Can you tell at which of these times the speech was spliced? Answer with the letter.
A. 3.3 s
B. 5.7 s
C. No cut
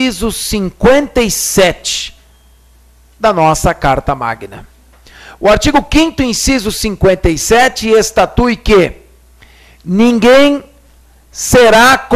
B